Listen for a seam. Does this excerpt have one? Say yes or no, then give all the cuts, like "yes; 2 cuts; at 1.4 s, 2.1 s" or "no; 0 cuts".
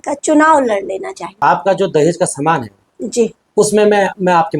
yes; 1 cut; at 1.3 s